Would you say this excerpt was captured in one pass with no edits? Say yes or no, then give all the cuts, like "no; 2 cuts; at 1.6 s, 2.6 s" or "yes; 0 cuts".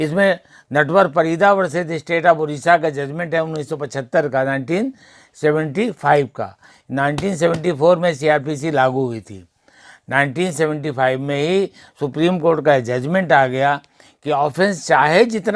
yes; 0 cuts